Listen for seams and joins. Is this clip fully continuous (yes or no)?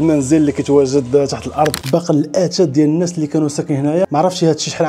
no